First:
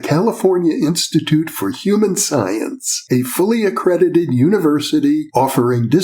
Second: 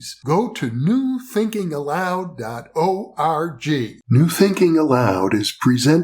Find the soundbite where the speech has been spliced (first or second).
second